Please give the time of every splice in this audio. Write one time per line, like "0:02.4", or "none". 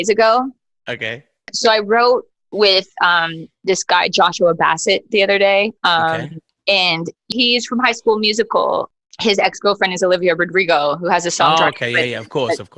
0:01.4
0:07.3
0:08.9